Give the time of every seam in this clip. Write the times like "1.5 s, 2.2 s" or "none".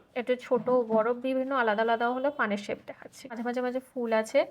3.4 s